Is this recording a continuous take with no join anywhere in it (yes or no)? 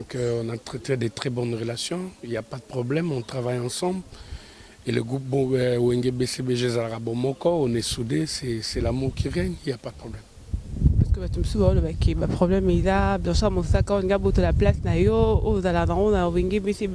yes